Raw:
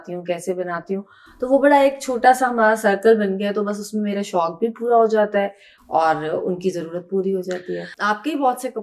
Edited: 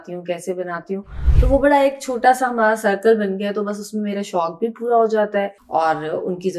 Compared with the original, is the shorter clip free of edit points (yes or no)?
no